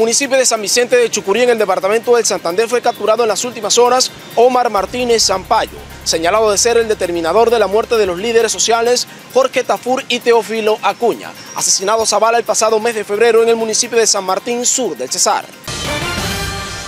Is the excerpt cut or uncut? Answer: cut